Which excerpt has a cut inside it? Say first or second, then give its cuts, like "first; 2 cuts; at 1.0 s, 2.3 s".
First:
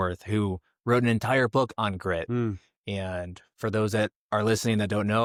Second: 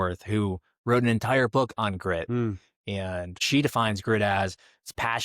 second; 1 cut; at 3.4 s